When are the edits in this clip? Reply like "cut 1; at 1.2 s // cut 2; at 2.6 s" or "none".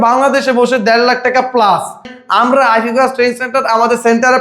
cut 1; at 2.1 s

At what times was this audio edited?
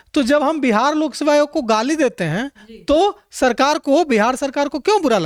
none

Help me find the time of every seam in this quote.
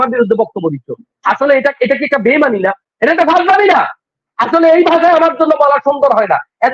cut 1; at 2.9 s

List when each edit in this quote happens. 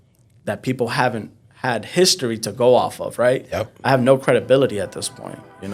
none

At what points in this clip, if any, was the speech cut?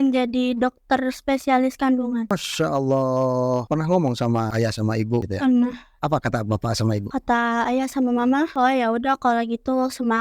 cut 1; at 3.7 s // cut 2; at 5.2 s // cut 3; at 5.9 s

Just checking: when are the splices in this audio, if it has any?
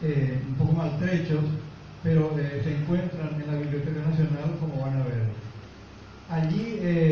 cut 1; at 4.3 s

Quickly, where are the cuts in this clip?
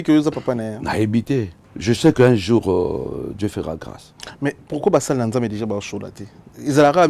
cut 1; at 1.6 s

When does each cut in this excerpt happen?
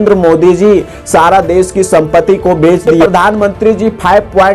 cut 1; at 2.9 s

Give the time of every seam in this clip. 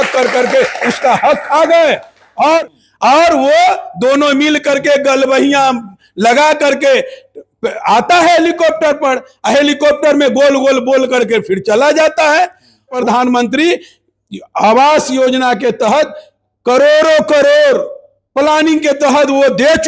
cut 1; at 2.6 s // cut 2; at 12.9 s

